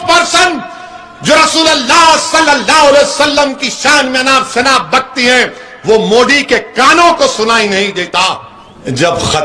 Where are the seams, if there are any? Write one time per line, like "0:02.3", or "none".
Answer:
0:08.1